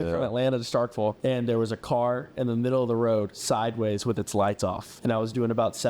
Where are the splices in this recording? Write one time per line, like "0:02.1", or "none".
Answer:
0:01.2
0:04.9